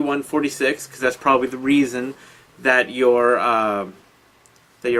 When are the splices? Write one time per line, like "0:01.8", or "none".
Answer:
none

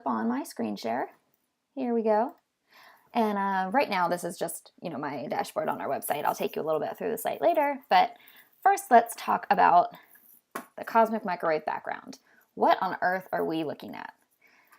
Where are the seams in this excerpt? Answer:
0:05.7

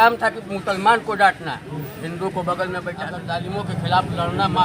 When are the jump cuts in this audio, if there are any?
0:03.1

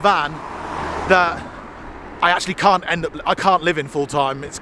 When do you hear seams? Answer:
none

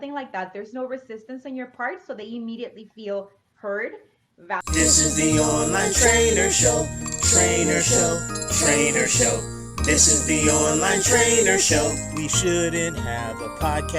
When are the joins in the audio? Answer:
0:04.6

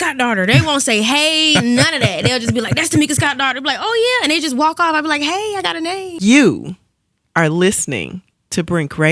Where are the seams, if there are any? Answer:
0:06.1

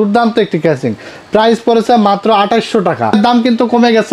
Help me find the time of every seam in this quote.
0:03.1

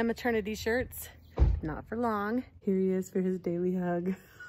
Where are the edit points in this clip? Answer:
0:02.5

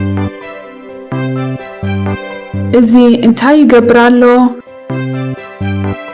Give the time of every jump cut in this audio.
none

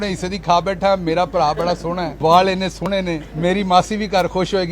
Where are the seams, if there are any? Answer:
0:02.1
0:03.2

